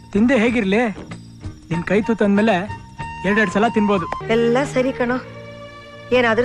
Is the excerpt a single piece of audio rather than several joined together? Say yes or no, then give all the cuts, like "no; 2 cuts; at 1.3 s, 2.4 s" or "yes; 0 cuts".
no; 1 cut; at 4.1 s